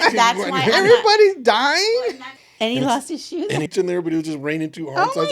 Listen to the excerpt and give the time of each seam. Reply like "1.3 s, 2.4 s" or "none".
2.1 s, 3.7 s